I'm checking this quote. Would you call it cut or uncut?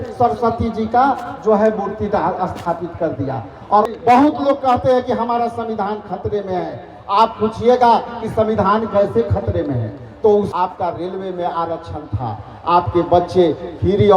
cut